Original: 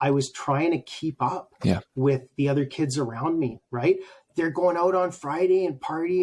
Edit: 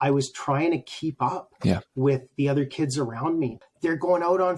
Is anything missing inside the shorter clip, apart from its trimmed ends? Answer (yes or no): yes